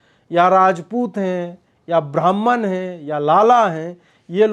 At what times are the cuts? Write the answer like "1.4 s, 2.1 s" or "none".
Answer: none